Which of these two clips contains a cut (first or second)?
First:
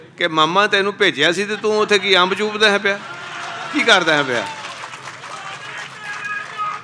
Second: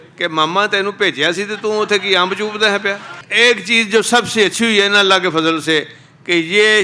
second